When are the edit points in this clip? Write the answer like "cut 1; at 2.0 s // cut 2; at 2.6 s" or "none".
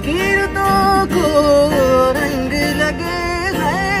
none